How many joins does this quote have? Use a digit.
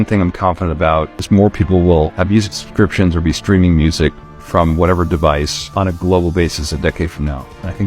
2